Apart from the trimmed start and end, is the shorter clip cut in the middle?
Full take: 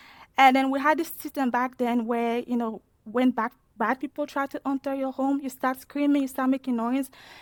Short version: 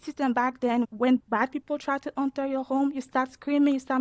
yes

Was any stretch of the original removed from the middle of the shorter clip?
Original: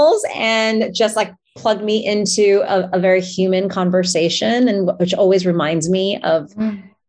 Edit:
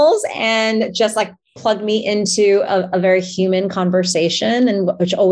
no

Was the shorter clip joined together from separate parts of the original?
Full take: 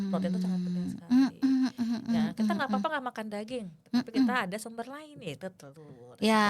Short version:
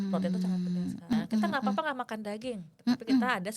yes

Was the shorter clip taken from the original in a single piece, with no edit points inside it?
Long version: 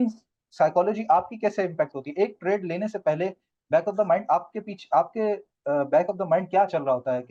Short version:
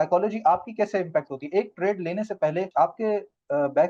no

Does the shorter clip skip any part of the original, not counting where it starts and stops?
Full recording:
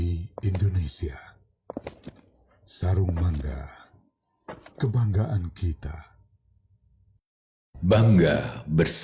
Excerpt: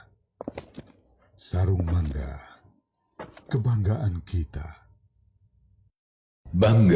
no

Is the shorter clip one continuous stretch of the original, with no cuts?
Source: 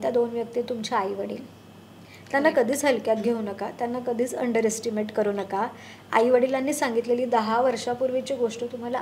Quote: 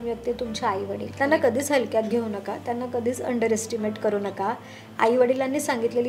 no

